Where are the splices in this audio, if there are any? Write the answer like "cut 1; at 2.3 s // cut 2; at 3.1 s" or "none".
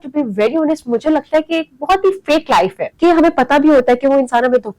cut 1; at 2.8 s